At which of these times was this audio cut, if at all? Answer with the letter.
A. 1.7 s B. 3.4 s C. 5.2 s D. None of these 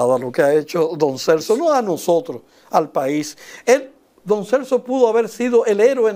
D